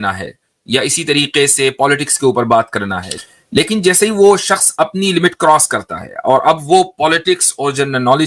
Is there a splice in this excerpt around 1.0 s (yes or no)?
no